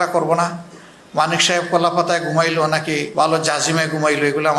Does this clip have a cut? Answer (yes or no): no